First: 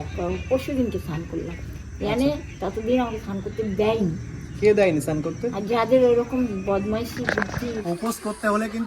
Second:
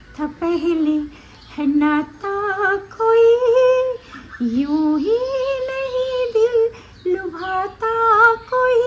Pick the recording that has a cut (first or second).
first